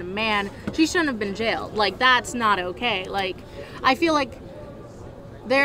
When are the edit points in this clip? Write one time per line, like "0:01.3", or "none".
none

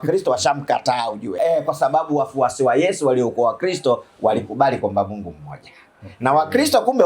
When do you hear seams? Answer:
0:01.3

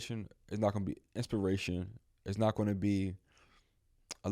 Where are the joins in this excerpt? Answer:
none

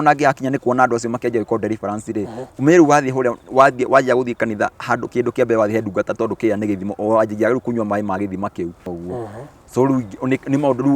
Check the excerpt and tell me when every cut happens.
0:08.8

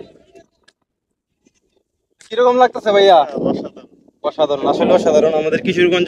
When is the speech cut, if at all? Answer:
none

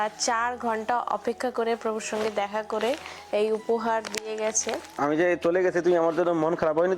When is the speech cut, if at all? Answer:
0:04.9

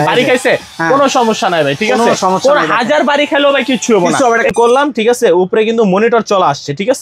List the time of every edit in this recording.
0:04.5

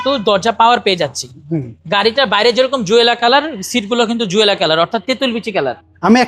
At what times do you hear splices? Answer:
none

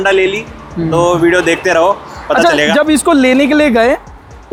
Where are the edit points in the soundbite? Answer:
none

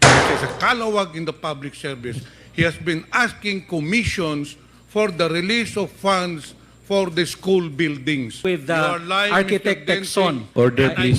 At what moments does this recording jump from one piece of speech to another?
0:08.4

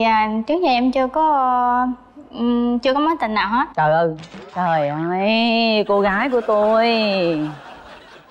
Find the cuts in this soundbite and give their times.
none

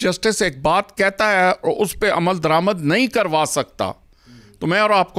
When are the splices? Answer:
none

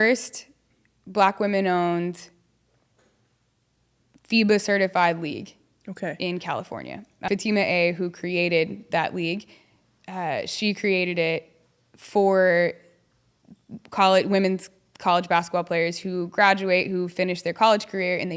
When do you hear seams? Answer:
0:07.3

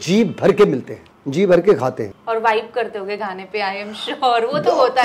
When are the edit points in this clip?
none

